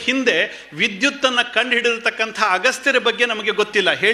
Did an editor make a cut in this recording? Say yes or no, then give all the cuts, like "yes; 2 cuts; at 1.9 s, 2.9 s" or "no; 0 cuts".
no; 0 cuts